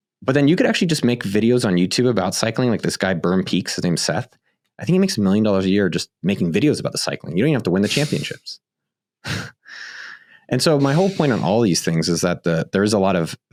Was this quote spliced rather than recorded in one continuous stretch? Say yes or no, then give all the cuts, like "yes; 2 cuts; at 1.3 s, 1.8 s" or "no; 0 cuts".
no; 0 cuts